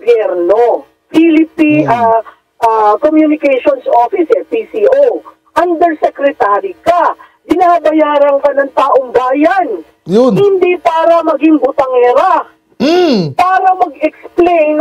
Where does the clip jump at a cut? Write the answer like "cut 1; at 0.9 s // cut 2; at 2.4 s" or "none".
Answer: none

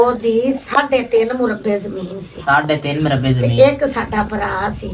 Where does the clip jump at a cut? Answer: none

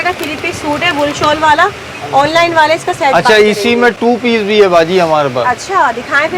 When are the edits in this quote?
none

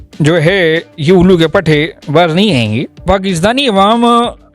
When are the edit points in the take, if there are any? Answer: cut 1; at 3.0 s

